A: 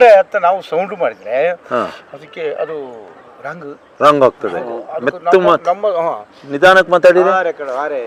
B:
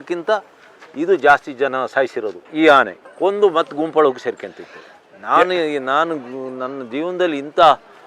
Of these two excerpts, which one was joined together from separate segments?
B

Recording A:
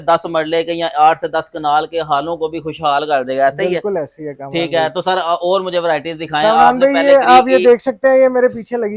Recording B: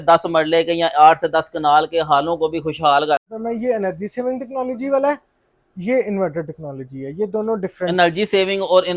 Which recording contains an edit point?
B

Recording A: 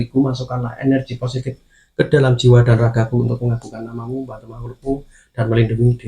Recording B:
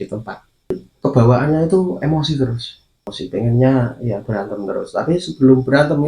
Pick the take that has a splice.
B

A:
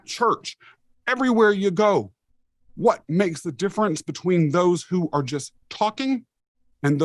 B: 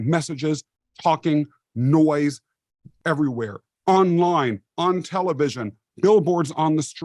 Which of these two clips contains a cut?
B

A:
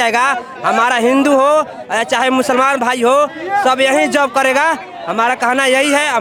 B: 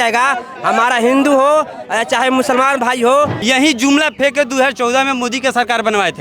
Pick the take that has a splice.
B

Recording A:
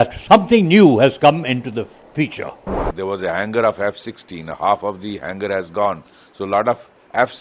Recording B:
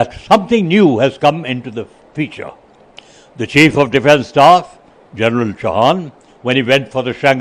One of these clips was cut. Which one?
A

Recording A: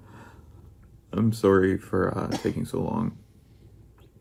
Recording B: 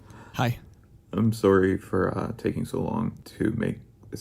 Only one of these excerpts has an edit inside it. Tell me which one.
B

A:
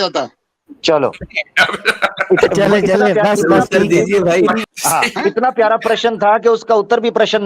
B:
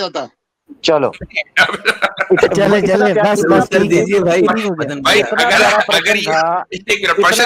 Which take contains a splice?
A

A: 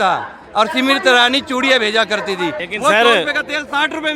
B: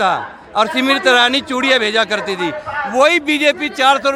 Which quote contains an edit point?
A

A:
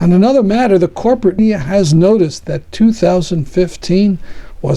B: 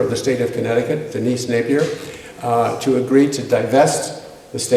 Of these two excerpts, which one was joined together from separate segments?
A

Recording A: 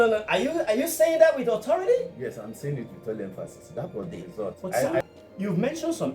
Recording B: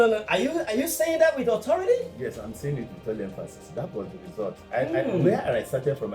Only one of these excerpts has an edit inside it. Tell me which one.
A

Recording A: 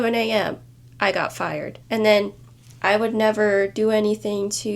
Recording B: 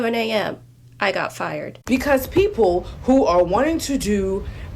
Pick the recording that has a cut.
B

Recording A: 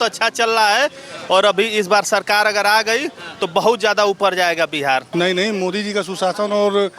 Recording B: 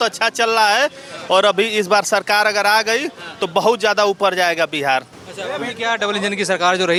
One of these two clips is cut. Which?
A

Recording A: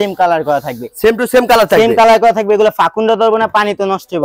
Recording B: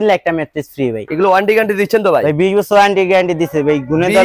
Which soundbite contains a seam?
B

